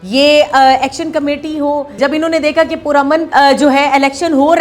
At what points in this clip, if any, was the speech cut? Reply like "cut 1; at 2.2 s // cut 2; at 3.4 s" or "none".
cut 1; at 2.0 s // cut 2; at 3.3 s